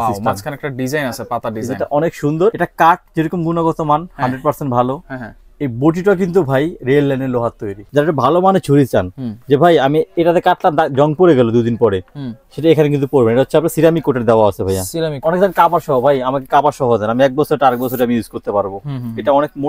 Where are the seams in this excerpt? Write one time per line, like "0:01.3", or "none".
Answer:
0:02.6
0:07.9
0:15.2